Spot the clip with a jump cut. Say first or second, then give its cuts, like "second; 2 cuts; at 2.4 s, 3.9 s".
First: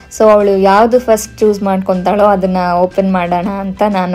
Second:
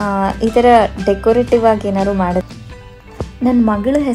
second; 1 cut; at 2.4 s